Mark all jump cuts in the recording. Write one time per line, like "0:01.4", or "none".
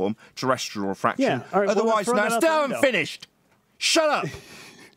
none